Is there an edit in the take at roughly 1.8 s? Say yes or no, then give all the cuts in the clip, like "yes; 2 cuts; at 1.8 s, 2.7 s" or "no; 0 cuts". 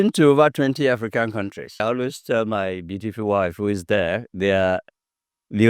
yes; 1 cut; at 1.8 s